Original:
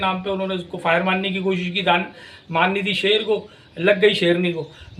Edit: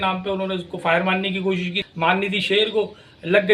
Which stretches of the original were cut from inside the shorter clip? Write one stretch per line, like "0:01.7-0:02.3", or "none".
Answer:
0:01.7-0:02.3